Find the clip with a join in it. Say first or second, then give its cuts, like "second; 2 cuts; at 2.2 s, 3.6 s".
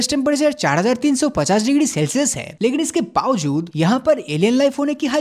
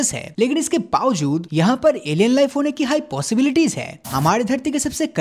second; 1 cut; at 4.1 s